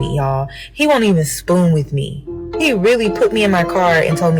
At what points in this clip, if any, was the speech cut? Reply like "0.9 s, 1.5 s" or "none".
none